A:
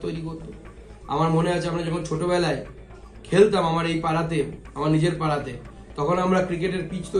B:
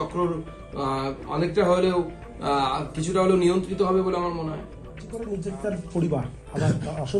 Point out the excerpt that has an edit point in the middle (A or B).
B